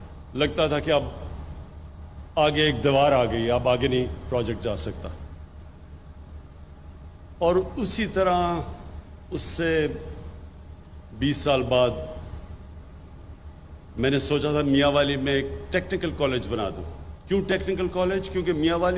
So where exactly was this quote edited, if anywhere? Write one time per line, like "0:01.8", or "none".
0:11.7
0:13.8